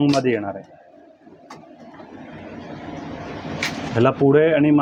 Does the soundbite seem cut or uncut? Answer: uncut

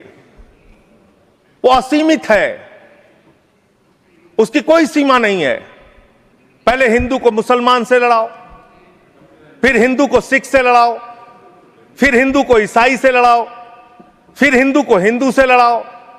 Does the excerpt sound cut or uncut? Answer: uncut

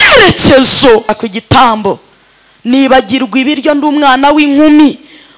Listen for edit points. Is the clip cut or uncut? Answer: cut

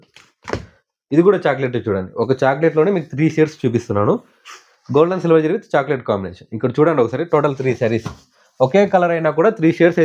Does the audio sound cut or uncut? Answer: uncut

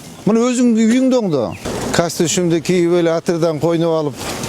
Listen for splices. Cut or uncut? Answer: cut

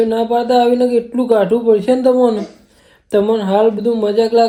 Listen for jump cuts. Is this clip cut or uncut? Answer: uncut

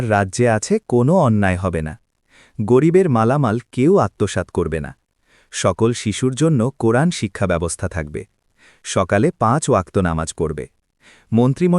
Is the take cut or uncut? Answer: uncut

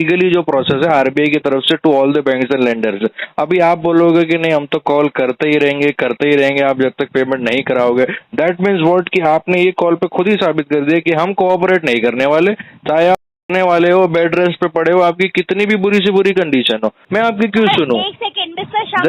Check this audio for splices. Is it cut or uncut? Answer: cut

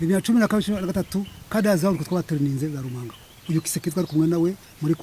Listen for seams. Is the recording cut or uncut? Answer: cut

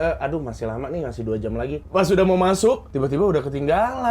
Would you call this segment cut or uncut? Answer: cut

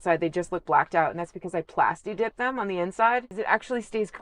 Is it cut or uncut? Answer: cut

